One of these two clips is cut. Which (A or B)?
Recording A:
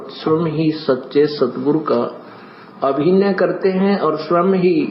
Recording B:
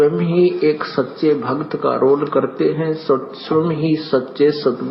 B